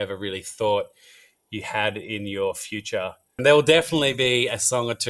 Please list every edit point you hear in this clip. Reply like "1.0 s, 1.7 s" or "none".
3.4 s